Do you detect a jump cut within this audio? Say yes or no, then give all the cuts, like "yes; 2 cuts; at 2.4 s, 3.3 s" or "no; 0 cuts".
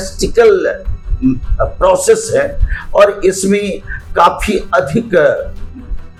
no; 0 cuts